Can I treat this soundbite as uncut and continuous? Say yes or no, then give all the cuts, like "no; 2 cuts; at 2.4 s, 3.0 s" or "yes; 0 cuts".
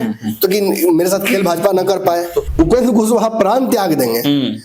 no; 1 cut; at 2.5 s